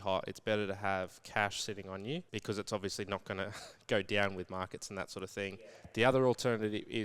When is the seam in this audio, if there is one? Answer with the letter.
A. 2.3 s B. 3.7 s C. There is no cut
A